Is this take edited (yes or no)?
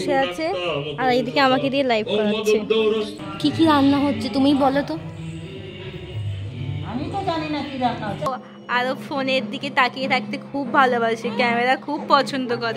yes